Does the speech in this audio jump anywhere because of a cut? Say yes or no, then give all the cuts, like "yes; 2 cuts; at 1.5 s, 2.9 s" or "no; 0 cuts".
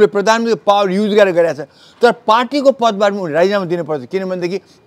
no; 0 cuts